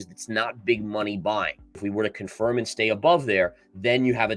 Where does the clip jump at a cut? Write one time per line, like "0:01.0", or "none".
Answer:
0:01.8